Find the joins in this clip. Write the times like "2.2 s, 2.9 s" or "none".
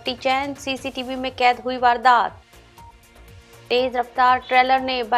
none